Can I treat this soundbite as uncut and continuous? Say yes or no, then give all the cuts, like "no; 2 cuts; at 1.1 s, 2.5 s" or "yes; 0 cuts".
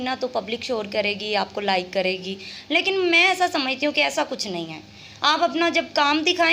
yes; 0 cuts